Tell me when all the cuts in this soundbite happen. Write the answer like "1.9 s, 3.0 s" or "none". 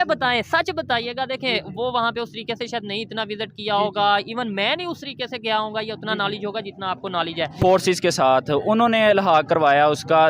7.5 s